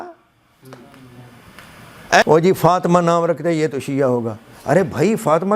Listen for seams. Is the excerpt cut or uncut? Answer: cut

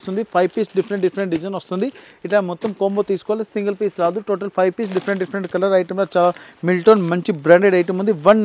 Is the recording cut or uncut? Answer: uncut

